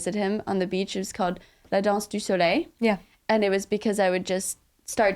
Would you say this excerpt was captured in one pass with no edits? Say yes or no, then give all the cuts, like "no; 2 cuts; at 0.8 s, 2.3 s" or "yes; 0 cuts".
no; 2 cuts; at 1.6 s, 3.1 s